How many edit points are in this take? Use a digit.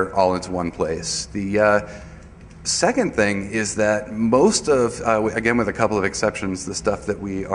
1